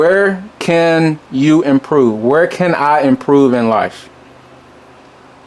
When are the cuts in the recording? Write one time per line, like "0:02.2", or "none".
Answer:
none